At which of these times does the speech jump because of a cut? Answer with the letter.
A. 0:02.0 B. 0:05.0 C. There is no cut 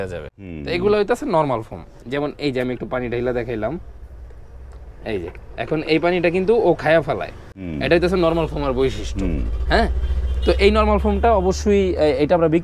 A